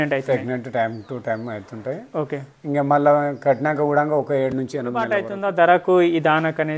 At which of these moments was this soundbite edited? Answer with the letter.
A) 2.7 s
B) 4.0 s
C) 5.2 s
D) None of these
C